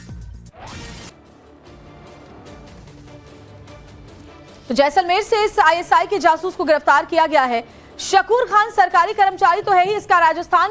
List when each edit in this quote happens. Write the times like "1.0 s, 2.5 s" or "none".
8.4 s